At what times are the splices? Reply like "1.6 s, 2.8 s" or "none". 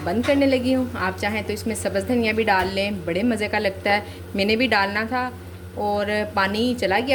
none